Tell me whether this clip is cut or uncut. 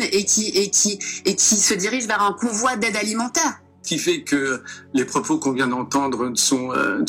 cut